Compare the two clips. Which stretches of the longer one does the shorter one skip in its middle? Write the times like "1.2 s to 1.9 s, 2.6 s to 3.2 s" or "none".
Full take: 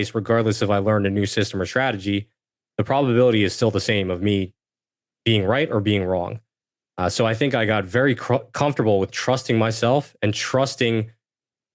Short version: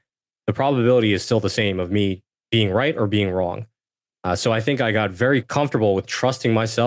4.6 s to 5.1 s, 8.2 s to 8.5 s